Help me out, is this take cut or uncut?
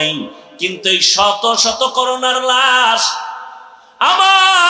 uncut